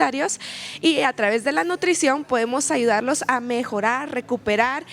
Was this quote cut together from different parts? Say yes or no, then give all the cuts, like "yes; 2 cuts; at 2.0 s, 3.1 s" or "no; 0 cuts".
no; 0 cuts